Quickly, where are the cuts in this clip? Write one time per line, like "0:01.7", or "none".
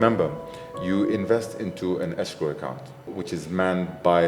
0:03.2

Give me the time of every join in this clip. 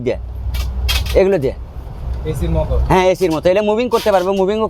none

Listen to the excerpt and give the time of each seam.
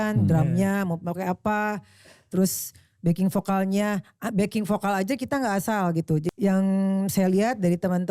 0:06.3

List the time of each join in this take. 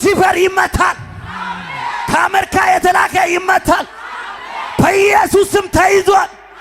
none

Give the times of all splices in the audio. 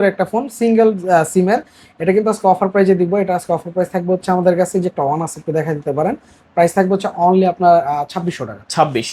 none

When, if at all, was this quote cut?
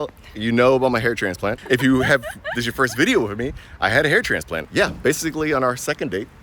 0:01.6
0:04.6

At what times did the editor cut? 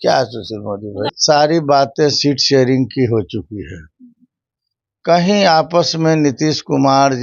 0:01.1

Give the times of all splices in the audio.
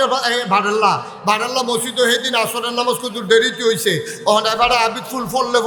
none

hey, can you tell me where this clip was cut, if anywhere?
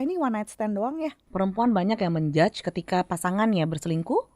0:01.2

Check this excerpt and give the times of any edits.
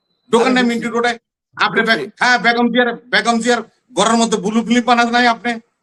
none

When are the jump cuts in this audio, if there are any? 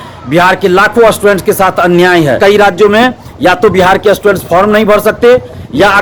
0:02.4

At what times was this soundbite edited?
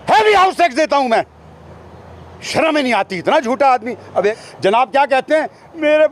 0:04.4

